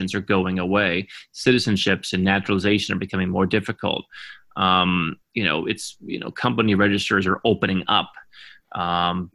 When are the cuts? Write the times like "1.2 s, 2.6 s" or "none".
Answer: none